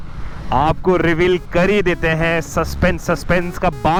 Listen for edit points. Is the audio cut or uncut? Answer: uncut